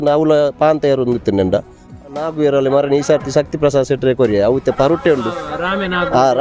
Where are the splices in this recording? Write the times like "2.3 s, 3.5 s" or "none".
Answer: 2.0 s